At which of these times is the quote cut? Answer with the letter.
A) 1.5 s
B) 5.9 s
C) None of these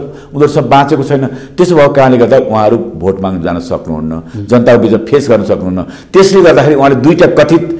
C